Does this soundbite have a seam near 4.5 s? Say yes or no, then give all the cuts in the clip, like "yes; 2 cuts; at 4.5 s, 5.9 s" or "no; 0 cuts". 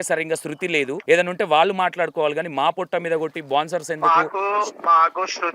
no; 1 cut; at 1.0 s